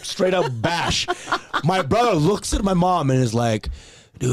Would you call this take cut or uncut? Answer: uncut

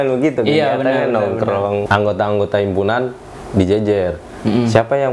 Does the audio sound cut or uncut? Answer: cut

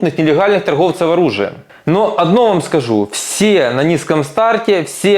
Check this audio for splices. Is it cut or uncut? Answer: cut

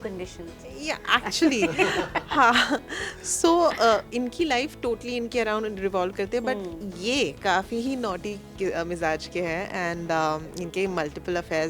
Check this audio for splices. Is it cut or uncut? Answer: uncut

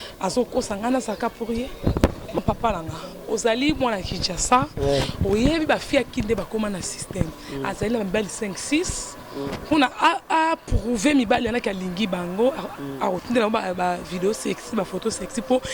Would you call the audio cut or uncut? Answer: cut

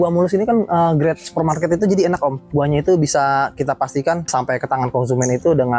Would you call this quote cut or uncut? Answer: cut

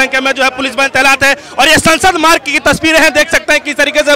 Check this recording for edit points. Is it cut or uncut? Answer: uncut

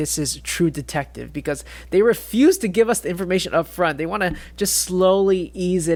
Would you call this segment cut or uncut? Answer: uncut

